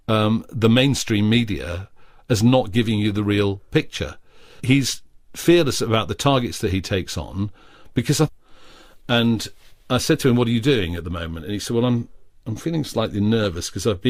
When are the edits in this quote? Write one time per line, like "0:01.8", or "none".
none